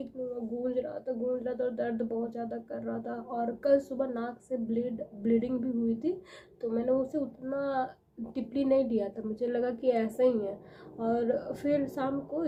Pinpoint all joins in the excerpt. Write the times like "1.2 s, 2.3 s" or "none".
none